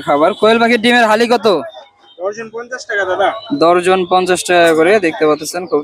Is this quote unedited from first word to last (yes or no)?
yes